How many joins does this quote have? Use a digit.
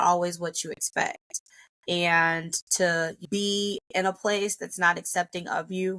1